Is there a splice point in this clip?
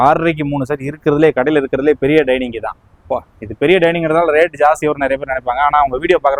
no; 0 cuts

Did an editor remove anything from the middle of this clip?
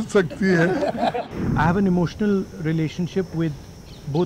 yes; 1 cut; at 1.2 s

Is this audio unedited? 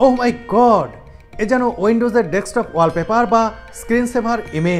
yes; 0 cuts

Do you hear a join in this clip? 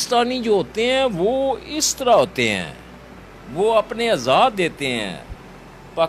no; 0 cuts

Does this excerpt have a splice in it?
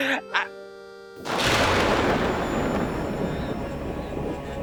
no; 0 cuts

